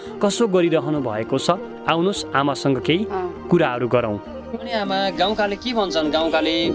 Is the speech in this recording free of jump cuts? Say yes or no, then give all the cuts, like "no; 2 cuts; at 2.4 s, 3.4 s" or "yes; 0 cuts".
no; 1 cut; at 4.6 s